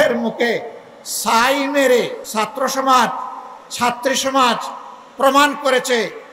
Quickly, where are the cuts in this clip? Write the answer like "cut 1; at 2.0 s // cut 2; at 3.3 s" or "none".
cut 1; at 2.2 s